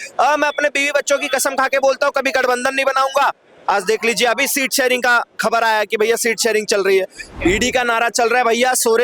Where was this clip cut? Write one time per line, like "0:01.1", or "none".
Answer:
0:07.3